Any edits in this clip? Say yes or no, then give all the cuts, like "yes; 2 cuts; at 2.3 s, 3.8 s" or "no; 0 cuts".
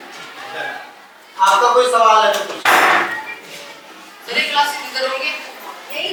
no; 0 cuts